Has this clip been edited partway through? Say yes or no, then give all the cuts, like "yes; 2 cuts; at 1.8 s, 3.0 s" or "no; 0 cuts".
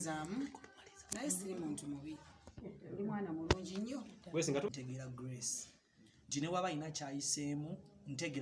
yes; 1 cut; at 4.7 s